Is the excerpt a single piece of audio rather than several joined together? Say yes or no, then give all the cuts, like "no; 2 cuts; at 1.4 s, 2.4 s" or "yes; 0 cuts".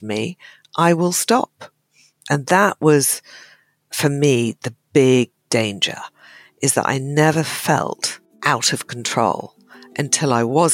yes; 0 cuts